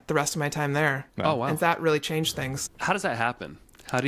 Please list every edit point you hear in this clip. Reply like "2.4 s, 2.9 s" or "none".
1.1 s, 2.6 s